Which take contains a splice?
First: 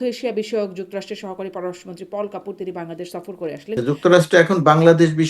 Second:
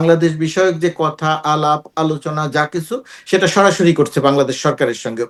first; 1 cut; at 3.8 s

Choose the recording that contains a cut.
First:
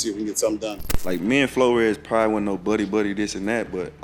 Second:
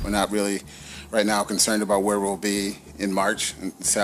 first; 1 cut; at 0.9 s

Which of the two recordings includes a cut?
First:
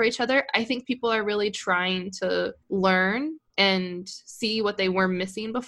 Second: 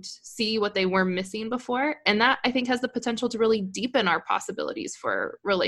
first; 1 cut; at 2.6 s

